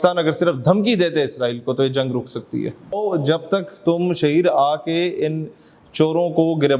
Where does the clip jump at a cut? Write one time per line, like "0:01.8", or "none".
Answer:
0:03.0